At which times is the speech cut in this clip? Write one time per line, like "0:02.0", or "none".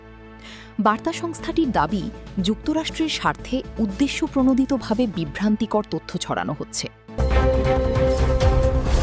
0:07.1